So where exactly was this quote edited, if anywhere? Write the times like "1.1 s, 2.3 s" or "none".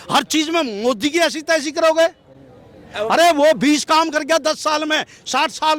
none

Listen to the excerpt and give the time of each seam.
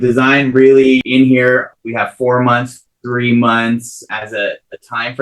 1.0 s, 1.8 s, 4.1 s

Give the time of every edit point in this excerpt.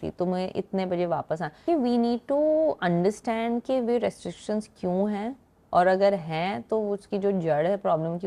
1.6 s

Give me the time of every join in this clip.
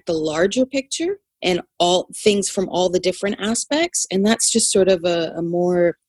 none

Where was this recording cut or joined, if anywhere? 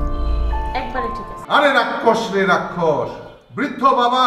1.3 s

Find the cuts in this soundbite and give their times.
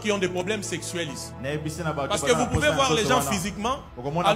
none

